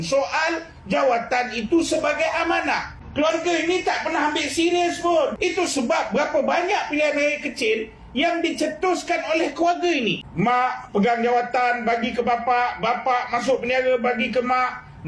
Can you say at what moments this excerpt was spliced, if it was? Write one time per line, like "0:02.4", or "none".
0:03.0
0:05.4
0:10.2